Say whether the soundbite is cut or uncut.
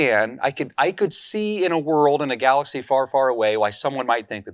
uncut